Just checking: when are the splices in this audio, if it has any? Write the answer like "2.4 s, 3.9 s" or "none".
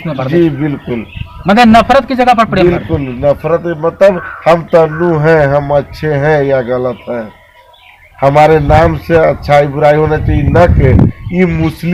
none